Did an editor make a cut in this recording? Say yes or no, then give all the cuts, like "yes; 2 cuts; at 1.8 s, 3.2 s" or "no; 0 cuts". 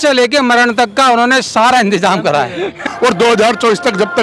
yes; 1 cut; at 2.8 s